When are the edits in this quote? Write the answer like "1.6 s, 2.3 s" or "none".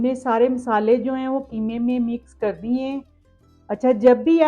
3.2 s